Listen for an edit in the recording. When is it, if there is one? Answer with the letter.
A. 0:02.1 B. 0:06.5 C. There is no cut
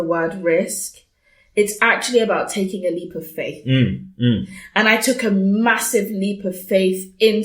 C